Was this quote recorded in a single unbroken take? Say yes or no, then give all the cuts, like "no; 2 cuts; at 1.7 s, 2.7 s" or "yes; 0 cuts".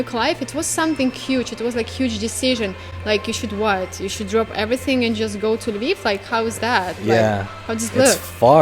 yes; 0 cuts